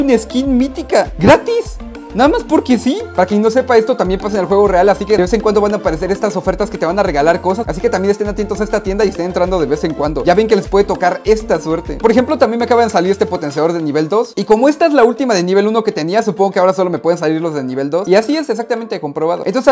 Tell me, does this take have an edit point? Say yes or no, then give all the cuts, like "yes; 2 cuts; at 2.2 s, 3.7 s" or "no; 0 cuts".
no; 0 cuts